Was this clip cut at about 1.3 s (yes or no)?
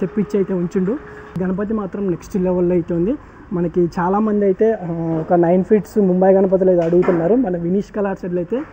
yes